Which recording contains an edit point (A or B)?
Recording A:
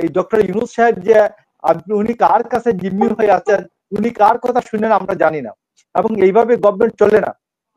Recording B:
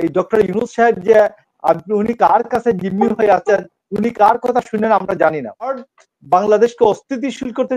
B